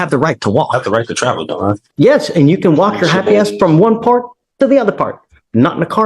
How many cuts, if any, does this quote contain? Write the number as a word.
one